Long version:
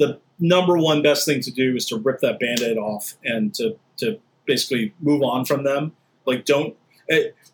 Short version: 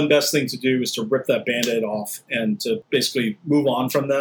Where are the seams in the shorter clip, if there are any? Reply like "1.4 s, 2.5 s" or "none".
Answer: 2.8 s

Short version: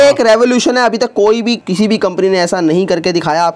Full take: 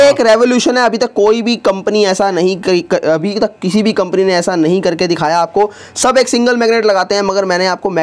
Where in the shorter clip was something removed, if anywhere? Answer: 1.6 s

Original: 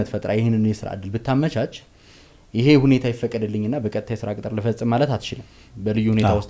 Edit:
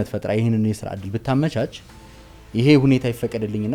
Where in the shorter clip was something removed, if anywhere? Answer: none

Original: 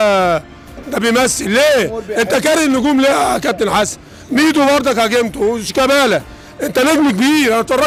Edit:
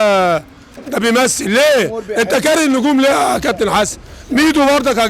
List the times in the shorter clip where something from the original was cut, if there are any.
none

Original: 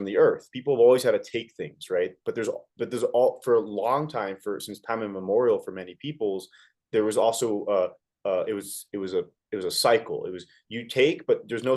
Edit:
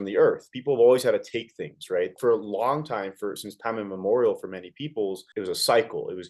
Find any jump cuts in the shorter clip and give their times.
2.2 s, 5.3 s

